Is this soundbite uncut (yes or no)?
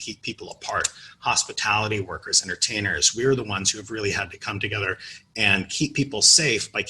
yes